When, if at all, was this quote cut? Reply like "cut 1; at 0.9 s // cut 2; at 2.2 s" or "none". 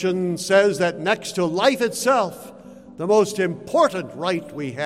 none